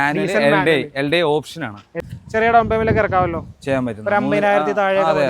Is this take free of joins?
no; 1 cut; at 1.9 s

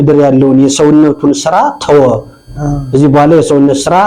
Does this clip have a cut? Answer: no; 0 cuts

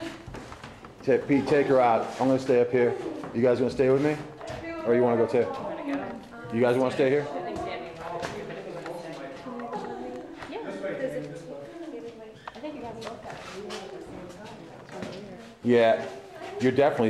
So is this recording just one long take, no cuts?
yes; 0 cuts

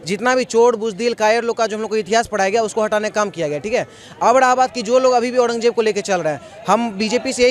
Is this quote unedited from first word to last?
yes; 0 cuts

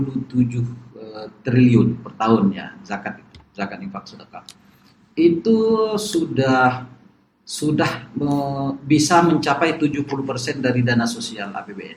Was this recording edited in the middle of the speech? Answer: no; 0 cuts

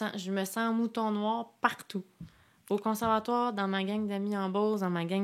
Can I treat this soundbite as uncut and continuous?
yes; 0 cuts

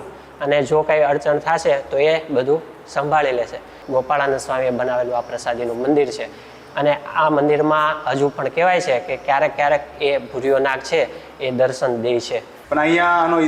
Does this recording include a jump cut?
yes; 2 cuts; at 3.8 s, 12.5 s

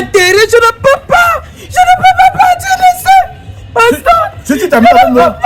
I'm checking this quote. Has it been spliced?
no; 0 cuts

